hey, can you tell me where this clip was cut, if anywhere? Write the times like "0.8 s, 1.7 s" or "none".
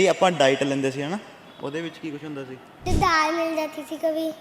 2.8 s